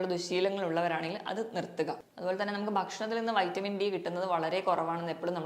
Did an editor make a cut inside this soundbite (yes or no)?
yes